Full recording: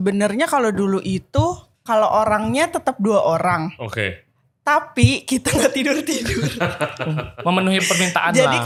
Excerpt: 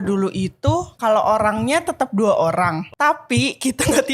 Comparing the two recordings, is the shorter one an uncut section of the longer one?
no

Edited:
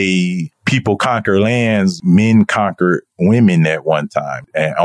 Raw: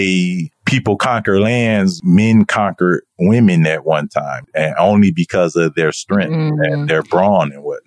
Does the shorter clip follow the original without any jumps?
yes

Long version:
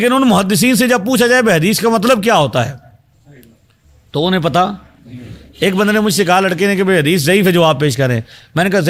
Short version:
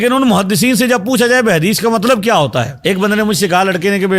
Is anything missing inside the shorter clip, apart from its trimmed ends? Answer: yes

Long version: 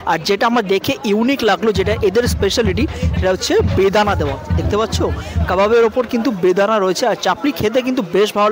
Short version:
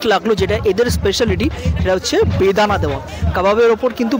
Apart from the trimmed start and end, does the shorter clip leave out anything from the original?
yes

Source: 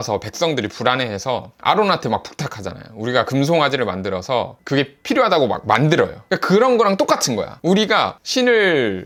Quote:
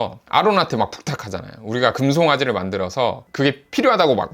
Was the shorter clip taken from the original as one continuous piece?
yes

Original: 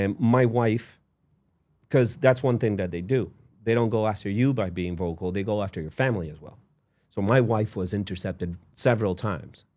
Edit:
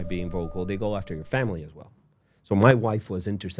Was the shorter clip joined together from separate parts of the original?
no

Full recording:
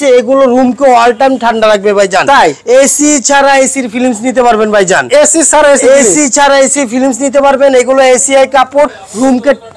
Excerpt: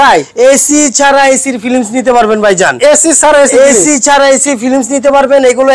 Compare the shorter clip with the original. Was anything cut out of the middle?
no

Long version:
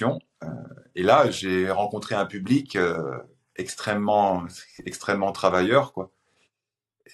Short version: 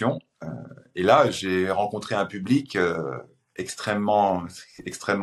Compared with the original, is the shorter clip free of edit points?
yes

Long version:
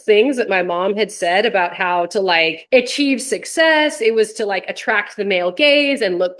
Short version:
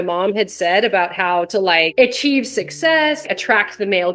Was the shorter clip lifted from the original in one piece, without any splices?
no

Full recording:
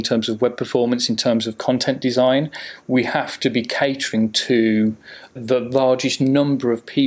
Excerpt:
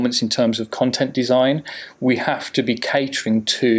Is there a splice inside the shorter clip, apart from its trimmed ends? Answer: no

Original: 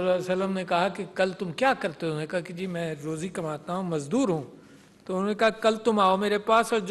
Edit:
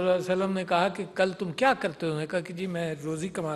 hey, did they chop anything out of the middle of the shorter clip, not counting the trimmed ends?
no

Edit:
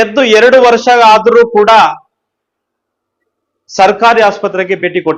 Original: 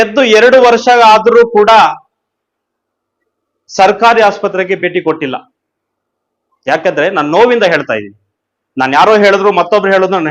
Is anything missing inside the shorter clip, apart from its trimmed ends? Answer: no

